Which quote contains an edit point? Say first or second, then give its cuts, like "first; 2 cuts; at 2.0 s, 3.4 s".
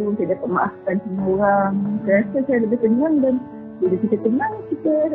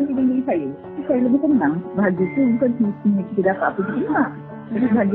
second; 2 cuts; at 1.0 s, 1.8 s